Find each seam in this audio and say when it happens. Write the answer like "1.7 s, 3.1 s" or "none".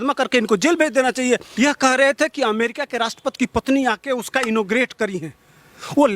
1.5 s

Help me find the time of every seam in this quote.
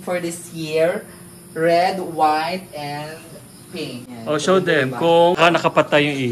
4.1 s, 5.4 s

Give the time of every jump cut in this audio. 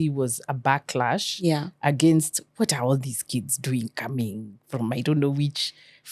none

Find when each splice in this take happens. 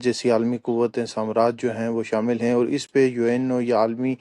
none

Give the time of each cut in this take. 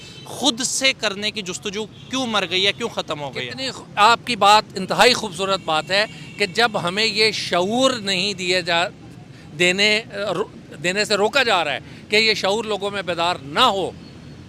none

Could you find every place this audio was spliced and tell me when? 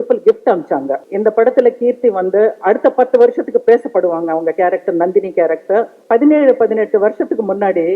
1.0 s, 6.0 s

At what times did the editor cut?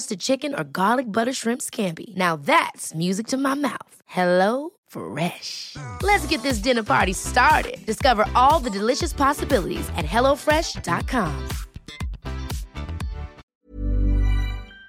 13.4 s

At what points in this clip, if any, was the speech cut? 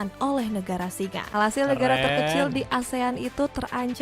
1.2 s

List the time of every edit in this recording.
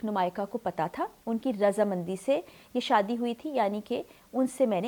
none

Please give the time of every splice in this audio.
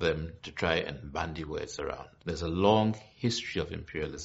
2.1 s

